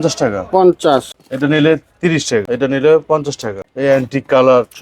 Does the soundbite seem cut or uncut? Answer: cut